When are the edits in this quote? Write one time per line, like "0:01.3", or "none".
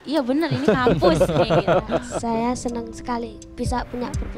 0:02.1